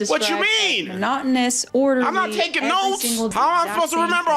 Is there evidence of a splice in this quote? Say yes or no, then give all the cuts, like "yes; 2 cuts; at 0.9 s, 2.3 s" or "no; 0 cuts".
yes; 2 cuts; at 1.6 s, 3.3 s